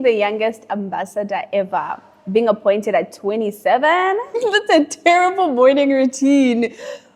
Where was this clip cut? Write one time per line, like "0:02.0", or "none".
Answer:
0:04.3